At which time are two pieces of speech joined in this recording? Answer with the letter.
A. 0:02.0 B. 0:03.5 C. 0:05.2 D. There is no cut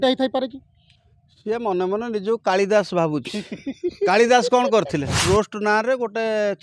C